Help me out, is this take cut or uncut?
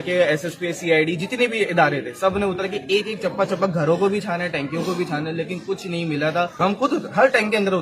cut